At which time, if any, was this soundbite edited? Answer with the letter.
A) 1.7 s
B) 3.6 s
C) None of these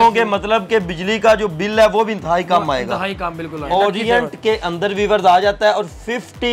B